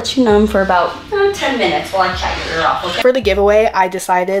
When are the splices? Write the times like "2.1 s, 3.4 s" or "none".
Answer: 2.9 s